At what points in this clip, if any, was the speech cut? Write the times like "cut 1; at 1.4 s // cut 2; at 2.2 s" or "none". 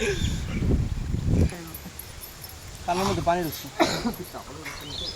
none